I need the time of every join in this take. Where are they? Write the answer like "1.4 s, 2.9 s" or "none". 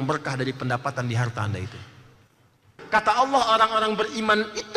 2.7 s